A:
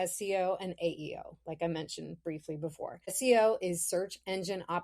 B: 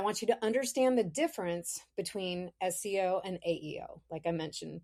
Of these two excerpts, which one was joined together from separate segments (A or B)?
A